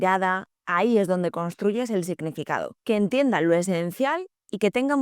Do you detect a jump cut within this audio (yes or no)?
yes